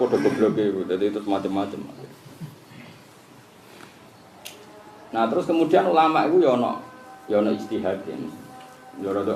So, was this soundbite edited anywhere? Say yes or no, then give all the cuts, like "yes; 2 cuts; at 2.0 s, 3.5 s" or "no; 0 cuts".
no; 0 cuts